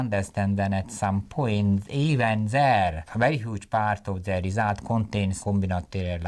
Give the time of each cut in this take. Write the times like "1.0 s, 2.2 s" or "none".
3.1 s, 5.4 s